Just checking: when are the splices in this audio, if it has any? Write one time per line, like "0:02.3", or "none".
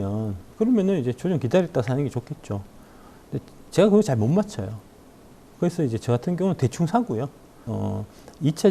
0:07.7